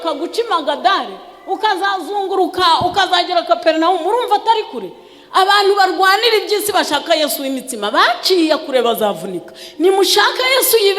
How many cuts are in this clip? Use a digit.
0